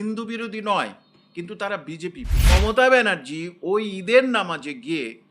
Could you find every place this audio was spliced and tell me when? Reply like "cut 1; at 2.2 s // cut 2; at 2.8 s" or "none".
cut 1; at 2.5 s